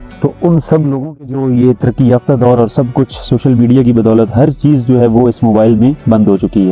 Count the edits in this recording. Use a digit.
1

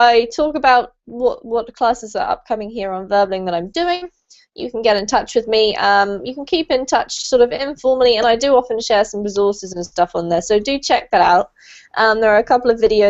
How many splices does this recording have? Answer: 1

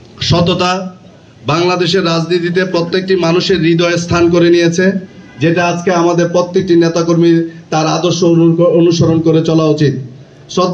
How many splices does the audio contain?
0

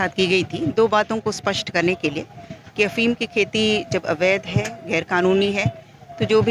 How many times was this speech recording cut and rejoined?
0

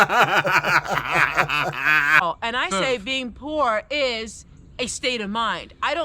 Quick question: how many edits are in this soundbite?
1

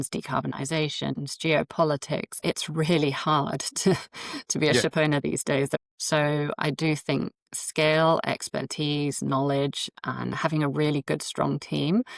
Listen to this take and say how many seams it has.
3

